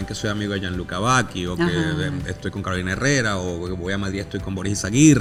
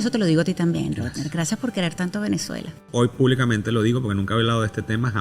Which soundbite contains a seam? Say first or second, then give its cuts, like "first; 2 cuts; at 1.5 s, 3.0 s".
second; 1 cut; at 2.9 s